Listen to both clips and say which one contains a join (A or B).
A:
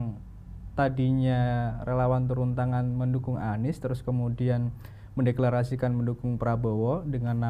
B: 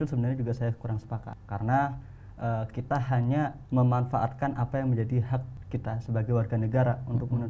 B